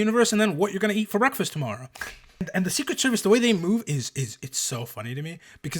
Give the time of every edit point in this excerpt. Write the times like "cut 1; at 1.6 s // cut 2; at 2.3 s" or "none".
cut 1; at 2.5 s